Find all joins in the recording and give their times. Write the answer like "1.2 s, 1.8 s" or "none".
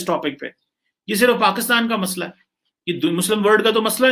none